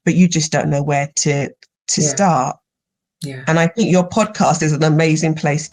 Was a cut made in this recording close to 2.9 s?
no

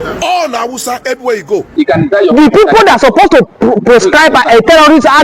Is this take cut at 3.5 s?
no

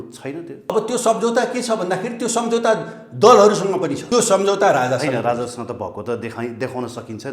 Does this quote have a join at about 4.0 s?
yes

